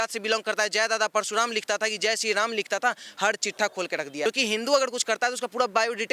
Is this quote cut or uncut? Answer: cut